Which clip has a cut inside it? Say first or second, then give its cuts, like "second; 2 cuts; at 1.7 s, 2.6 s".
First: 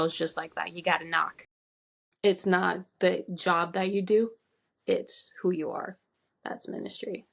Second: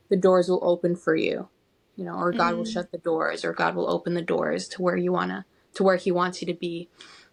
first; 1 cut; at 1.7 s